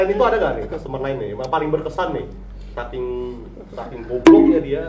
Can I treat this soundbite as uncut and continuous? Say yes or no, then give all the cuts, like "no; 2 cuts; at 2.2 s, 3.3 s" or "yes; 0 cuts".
yes; 0 cuts